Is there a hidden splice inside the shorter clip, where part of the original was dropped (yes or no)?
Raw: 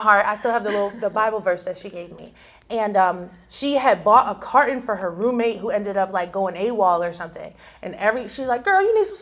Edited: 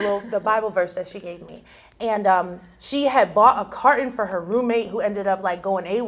no